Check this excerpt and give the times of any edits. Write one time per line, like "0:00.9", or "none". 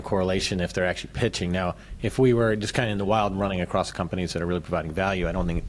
none